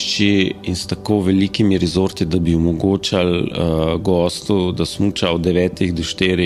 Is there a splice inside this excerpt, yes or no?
no